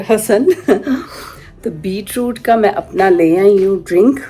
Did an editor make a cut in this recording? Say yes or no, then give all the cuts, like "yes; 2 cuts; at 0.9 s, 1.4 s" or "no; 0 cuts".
no; 0 cuts